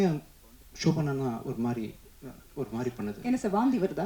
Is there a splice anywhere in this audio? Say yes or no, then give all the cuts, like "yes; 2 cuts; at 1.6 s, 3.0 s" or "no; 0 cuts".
no; 0 cuts